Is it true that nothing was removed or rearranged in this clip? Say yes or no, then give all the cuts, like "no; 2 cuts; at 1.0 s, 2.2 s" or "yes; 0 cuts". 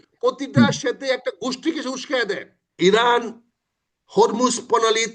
no; 1 cut; at 2.6 s